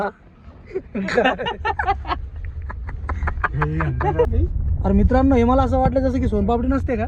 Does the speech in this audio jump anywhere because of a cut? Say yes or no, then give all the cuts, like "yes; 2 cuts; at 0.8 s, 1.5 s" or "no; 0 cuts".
yes; 1 cut; at 4.3 s